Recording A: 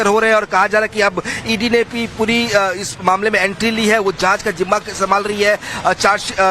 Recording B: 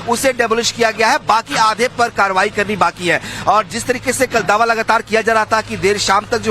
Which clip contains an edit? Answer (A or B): A